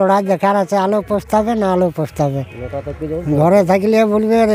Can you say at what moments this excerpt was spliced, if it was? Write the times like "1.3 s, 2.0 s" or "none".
none